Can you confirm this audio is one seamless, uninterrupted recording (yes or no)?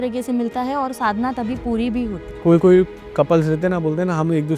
no